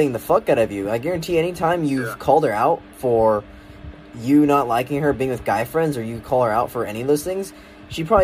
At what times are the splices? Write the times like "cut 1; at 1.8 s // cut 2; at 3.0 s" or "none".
none